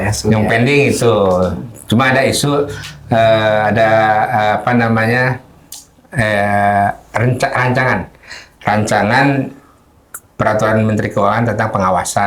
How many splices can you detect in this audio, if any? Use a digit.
0